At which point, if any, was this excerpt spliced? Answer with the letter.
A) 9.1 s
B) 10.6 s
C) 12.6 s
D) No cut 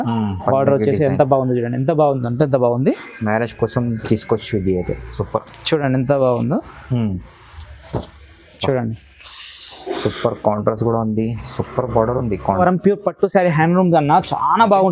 C